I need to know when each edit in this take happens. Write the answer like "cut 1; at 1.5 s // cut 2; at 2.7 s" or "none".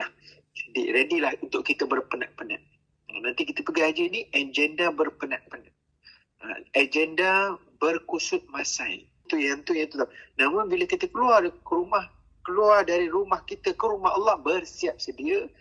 cut 1; at 9.3 s

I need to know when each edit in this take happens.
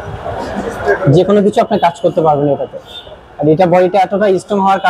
none

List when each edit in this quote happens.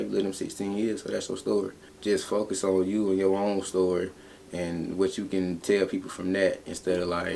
cut 1; at 1.9 s

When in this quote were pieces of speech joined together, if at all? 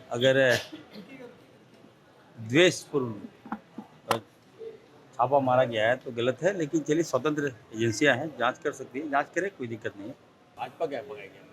cut 1; at 10.4 s

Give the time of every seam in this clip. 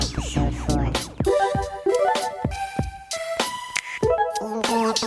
none

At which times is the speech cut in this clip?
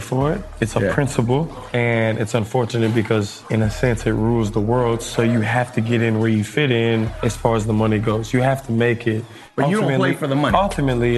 cut 1; at 1.6 s // cut 2; at 3.4 s // cut 3; at 7.1 s // cut 4; at 9.4 s

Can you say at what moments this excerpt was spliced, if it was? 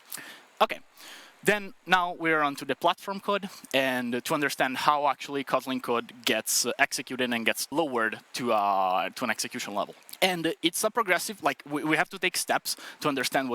cut 1; at 7.7 s // cut 2; at 10.0 s

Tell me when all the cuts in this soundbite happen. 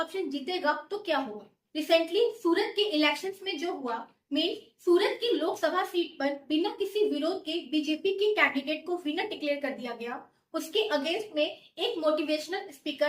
cut 1; at 1.6 s

